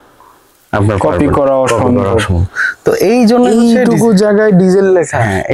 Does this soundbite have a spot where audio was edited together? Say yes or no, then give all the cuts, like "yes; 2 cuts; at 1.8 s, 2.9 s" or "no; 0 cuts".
no; 0 cuts